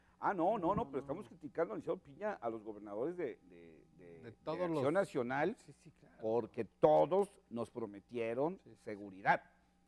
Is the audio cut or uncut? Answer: cut